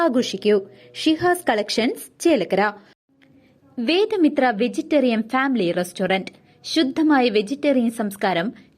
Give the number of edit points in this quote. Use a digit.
1